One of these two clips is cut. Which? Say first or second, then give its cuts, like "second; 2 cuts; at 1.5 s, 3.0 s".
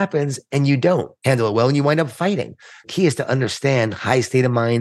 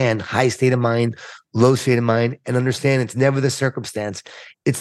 first; 2 cuts; at 1.1 s, 2.8 s